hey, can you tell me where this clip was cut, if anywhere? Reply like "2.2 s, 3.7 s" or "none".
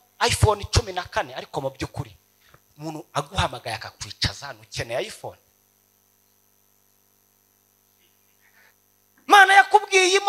8.7 s